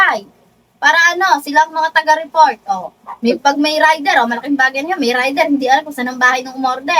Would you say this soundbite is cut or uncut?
uncut